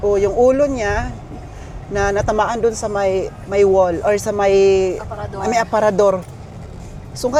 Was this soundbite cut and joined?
no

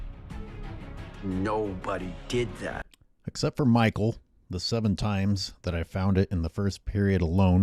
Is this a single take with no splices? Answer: no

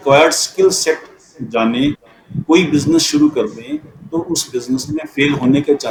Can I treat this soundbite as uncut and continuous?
yes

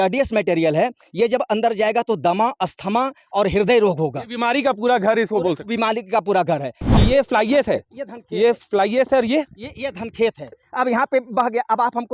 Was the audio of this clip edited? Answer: yes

